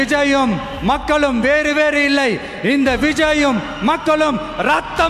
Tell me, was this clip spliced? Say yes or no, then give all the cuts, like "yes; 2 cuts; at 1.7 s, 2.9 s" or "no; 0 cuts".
no; 0 cuts